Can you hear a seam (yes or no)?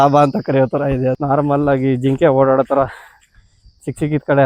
yes